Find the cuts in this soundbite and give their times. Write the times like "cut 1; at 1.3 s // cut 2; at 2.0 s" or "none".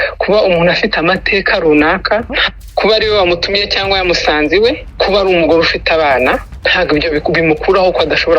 cut 1; at 2.5 s // cut 2; at 4.9 s // cut 3; at 6.6 s